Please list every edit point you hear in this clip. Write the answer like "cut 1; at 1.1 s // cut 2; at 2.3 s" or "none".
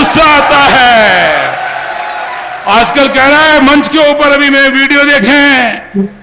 none